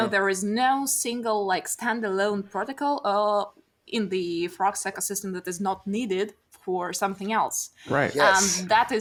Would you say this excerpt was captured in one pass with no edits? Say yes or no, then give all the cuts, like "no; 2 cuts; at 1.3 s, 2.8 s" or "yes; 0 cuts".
yes; 0 cuts